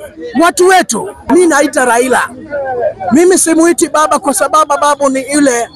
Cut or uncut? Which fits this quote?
cut